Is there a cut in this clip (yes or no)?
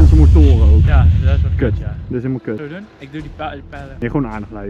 no